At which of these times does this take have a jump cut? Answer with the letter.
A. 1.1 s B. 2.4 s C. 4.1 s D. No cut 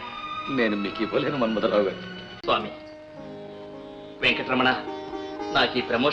B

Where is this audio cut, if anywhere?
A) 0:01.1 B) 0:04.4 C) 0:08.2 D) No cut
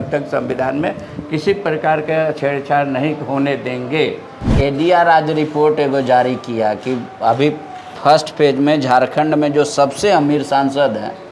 B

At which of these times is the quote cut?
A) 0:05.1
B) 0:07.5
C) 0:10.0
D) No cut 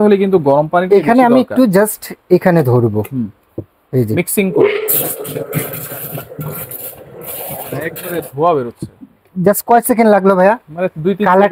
D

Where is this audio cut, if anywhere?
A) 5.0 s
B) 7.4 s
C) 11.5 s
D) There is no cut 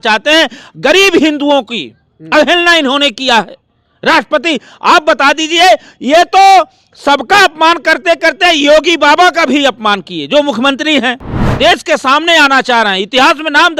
C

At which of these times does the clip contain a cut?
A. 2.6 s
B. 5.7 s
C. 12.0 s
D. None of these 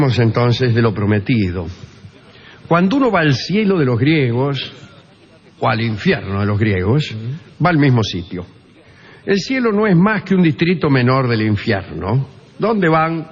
D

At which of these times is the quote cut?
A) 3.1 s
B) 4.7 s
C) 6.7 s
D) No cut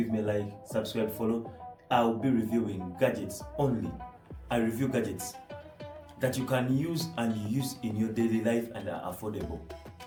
D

